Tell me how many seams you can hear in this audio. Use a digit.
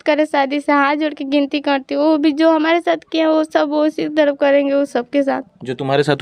0